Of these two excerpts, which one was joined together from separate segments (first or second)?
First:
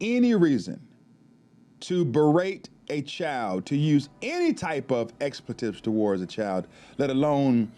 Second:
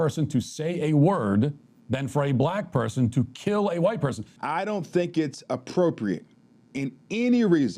second